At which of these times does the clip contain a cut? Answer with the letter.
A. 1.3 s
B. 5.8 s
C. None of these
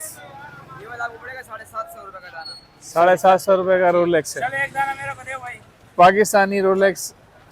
C